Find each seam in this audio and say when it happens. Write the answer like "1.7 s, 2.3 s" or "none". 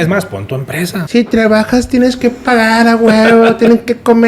1.0 s